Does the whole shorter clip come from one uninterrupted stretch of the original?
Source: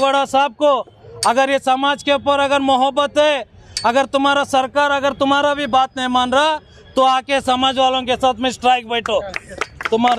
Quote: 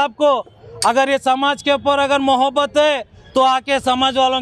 no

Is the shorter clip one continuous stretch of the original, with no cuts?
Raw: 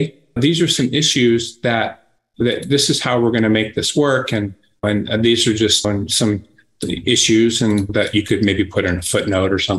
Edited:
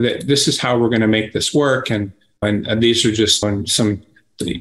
yes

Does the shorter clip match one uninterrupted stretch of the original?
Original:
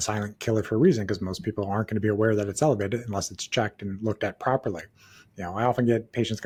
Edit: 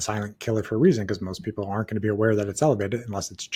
yes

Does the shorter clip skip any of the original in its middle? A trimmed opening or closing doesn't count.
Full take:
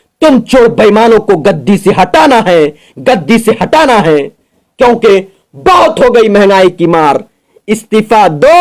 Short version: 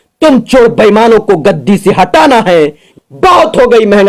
yes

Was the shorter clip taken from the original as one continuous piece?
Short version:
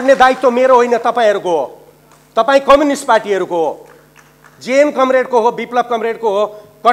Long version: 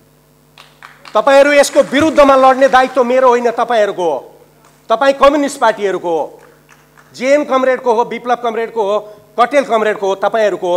yes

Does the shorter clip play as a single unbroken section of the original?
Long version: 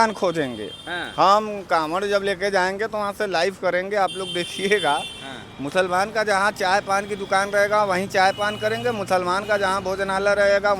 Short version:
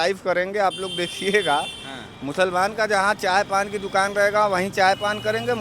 yes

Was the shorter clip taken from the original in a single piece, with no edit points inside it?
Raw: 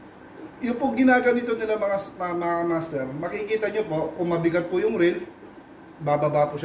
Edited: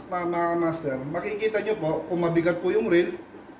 yes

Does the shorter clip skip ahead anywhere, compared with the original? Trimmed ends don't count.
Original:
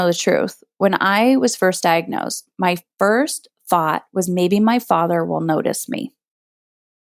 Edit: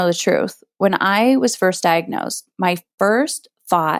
no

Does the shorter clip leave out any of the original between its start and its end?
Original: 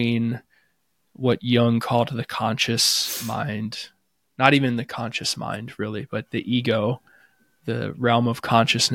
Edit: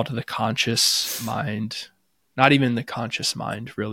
no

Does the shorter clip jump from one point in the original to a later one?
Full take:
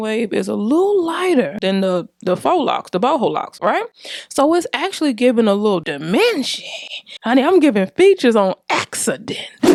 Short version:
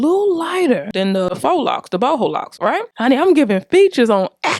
yes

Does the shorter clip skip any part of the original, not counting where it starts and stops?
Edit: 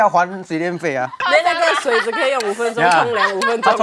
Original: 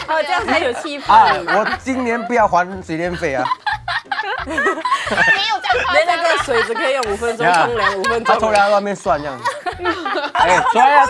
yes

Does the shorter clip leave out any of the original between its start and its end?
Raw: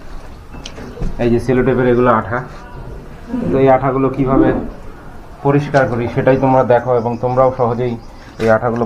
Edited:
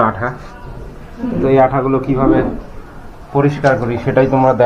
no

